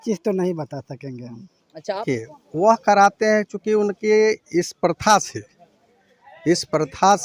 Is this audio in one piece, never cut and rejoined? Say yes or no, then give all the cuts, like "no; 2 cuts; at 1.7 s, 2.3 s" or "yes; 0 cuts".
no; 1 cut; at 2.0 s